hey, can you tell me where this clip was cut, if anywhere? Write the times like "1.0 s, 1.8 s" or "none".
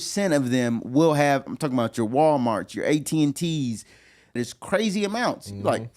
4.4 s

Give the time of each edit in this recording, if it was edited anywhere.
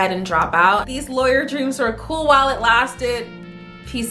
0.9 s

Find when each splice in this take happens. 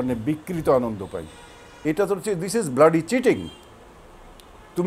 1.7 s

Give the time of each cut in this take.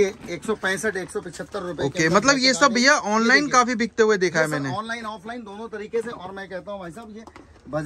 none

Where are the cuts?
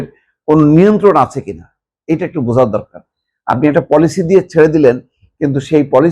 none

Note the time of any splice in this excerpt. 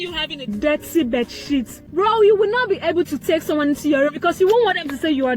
1.8 s

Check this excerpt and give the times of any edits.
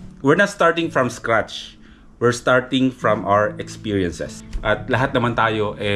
4.6 s

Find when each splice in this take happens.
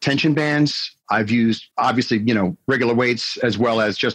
none

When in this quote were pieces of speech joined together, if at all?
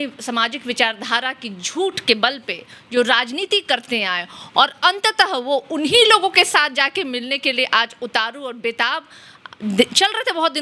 none

